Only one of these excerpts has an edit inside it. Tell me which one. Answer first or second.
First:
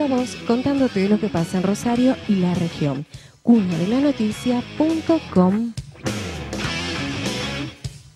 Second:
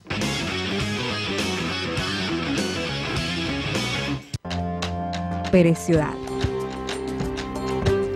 second